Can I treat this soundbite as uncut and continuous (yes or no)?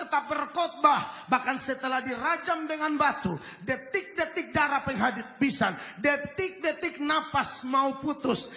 yes